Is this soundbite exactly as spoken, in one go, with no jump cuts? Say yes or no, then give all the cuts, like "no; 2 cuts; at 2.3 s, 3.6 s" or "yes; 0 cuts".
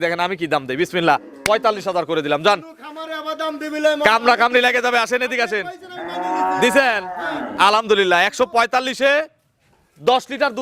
yes; 0 cuts